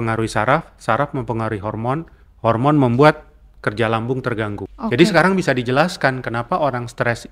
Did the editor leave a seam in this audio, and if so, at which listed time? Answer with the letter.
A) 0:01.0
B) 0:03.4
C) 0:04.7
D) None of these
C